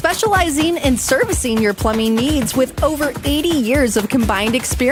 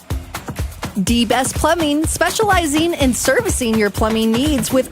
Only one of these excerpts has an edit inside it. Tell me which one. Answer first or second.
second